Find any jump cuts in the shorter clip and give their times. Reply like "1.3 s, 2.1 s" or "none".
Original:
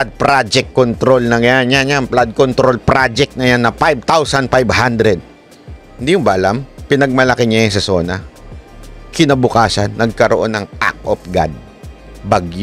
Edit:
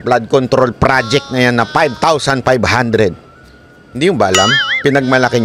none